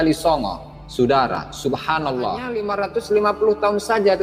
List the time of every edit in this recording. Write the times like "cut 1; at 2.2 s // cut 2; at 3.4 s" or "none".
cut 1; at 2.7 s